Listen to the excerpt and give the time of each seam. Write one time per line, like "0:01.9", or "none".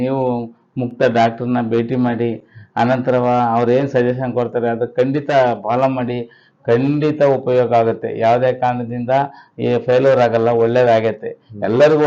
none